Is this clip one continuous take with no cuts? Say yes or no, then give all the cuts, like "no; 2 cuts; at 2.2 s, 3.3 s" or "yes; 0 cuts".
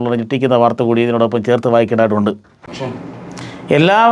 no; 1 cut; at 2.9 s